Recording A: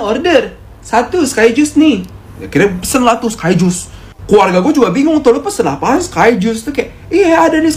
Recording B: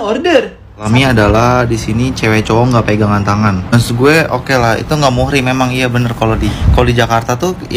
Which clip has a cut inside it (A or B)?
B